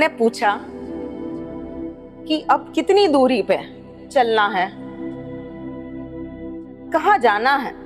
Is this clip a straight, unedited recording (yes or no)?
yes